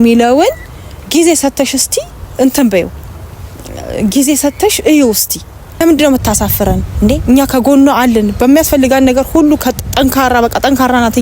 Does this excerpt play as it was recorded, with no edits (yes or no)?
no